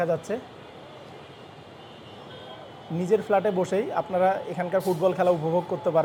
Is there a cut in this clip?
no; 0 cuts

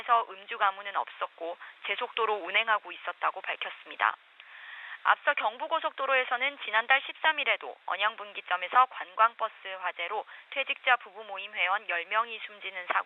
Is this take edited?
no; 0 cuts

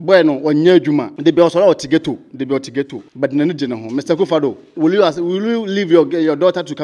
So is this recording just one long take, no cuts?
no; 2 cuts; at 1.1 s, 3.0 s

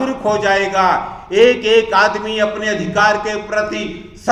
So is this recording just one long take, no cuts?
yes; 0 cuts

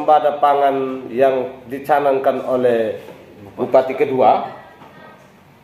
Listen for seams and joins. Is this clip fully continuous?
yes; 0 cuts

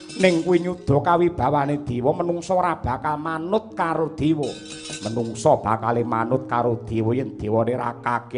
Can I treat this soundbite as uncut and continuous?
yes; 0 cuts

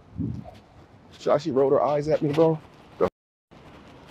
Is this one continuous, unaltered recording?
yes; 0 cuts

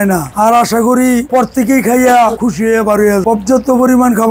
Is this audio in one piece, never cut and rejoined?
yes; 0 cuts

